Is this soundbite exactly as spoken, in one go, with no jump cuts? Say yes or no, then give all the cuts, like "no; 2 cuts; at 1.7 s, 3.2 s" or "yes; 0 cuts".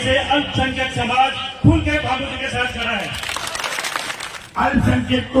no; 1 cut; at 4.2 s